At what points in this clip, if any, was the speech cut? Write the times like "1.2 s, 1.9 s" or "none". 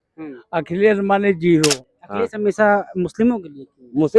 1.9 s

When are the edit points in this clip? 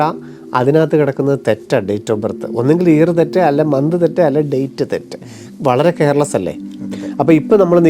6.9 s

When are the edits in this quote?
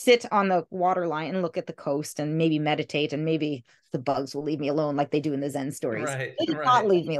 6.2 s

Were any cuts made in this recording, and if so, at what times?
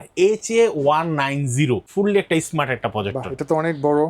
1.9 s

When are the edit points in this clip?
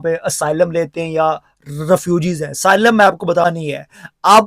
3.4 s

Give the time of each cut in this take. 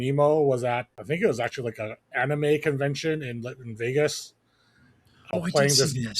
0.9 s, 5.3 s

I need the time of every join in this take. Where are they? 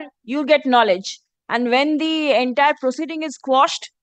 none

